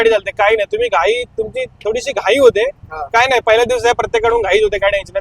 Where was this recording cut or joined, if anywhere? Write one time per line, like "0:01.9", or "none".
none